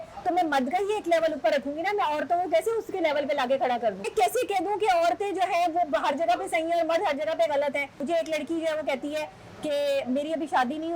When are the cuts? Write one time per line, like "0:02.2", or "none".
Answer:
0:04.1
0:08.0